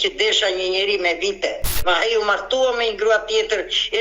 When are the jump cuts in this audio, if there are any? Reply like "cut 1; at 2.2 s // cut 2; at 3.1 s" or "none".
cut 1; at 1.8 s